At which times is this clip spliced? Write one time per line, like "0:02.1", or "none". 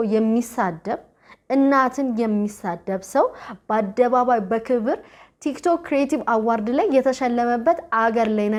none